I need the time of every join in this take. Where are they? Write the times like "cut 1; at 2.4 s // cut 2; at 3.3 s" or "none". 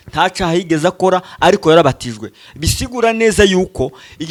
none